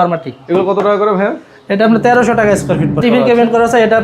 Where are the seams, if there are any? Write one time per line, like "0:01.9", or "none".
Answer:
0:03.0